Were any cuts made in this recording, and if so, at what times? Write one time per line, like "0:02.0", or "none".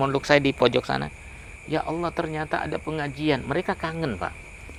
none